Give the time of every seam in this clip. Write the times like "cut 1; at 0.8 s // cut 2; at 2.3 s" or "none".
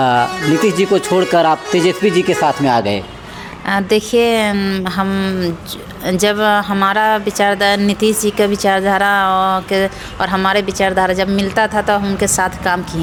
none